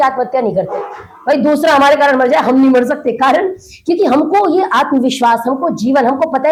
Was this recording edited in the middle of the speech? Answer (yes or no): no